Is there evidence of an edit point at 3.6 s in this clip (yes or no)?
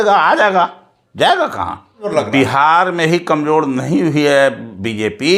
no